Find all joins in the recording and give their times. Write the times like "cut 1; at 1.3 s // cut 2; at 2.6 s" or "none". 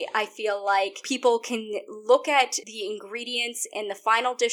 cut 1; at 1.0 s // cut 2; at 2.6 s

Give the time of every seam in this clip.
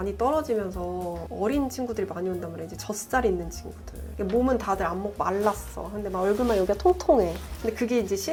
none

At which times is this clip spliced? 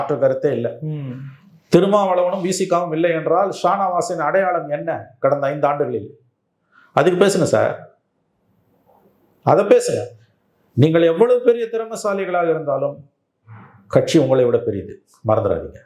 none

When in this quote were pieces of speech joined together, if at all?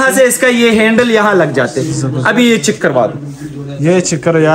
none

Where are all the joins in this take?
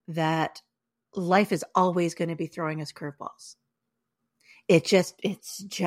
none

